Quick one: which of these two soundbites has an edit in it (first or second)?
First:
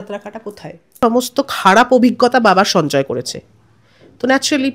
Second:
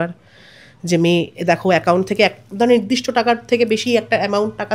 first